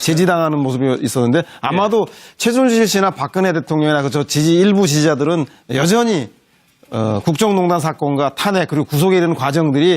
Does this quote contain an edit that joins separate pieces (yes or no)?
yes